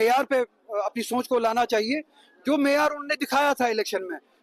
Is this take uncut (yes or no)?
no